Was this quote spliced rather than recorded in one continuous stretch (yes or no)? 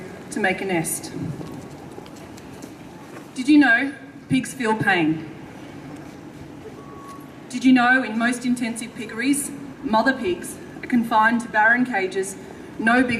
no